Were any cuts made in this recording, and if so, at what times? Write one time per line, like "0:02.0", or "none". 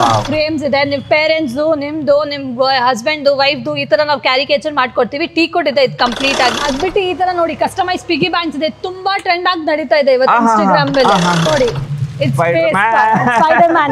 0:06.6
0:11.5